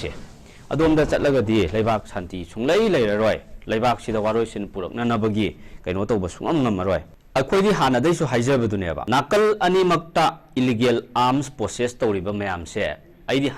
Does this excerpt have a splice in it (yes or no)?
yes